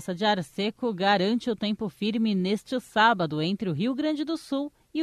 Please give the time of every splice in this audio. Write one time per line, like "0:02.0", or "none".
none